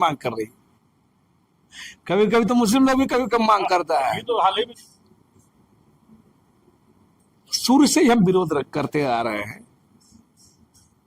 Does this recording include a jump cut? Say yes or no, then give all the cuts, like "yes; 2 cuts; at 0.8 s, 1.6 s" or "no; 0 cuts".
yes; 1 cut; at 4.7 s